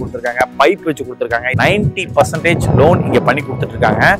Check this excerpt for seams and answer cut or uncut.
cut